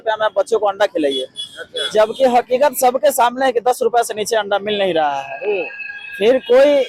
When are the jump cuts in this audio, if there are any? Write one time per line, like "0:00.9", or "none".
none